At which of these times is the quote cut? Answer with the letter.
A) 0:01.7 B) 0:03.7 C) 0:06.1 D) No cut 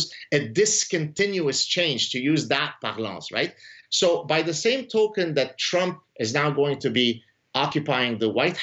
B